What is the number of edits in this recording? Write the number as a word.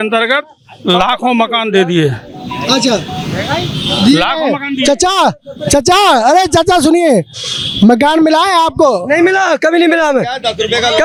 zero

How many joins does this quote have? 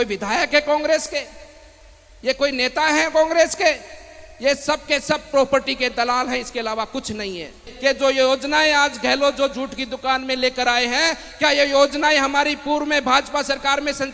one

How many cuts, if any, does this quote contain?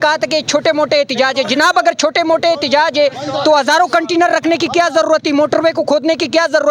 zero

